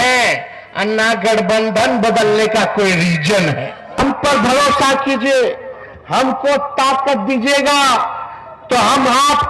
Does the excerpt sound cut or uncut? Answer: cut